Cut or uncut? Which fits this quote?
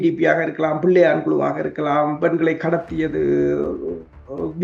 uncut